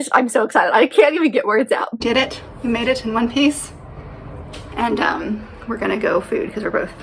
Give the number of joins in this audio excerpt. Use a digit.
1